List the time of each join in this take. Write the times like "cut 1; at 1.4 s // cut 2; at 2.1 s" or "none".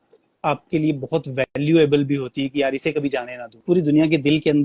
cut 1; at 3.5 s